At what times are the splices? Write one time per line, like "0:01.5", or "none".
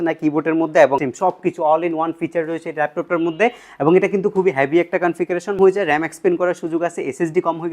0:01.1
0:05.6